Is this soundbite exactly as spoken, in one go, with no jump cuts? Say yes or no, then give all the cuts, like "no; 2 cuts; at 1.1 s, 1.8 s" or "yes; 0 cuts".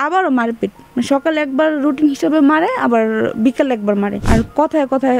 no; 1 cut; at 4.2 s